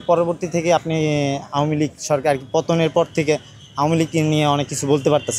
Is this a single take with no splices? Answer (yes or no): yes